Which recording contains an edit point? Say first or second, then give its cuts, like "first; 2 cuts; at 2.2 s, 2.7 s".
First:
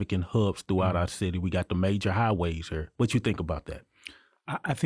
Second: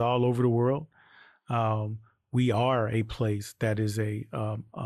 first; 1 cut; at 2.9 s